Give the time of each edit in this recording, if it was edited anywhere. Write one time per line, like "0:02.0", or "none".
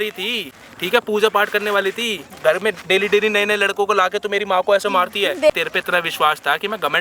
0:02.4
0:05.5